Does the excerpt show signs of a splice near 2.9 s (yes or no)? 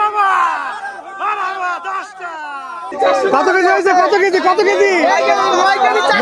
yes